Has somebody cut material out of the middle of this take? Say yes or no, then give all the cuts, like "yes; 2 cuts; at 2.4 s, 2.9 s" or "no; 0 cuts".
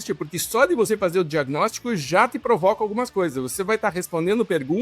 no; 0 cuts